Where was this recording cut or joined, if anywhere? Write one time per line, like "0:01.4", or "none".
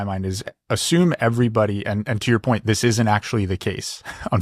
none